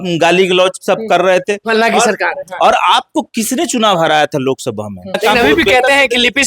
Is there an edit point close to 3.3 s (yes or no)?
no